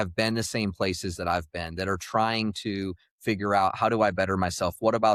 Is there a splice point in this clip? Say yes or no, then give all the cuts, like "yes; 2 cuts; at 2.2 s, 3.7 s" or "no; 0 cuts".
no; 0 cuts